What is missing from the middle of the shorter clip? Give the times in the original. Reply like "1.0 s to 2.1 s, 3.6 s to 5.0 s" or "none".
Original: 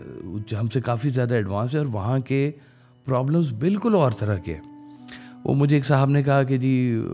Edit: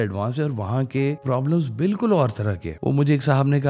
2.6 s to 3.0 s, 4.5 s to 5.3 s